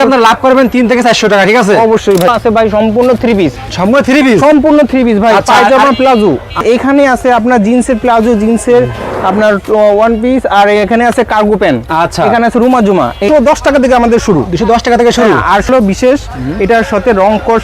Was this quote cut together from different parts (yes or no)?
yes